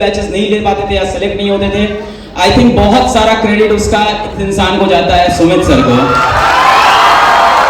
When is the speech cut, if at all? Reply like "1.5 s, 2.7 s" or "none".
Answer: none